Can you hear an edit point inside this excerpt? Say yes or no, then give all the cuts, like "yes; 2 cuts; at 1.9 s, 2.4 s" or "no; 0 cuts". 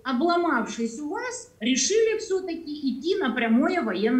no; 0 cuts